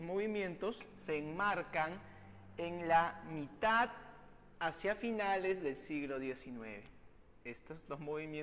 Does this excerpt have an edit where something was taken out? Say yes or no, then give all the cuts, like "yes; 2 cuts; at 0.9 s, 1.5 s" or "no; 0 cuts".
yes; 1 cut; at 7.4 s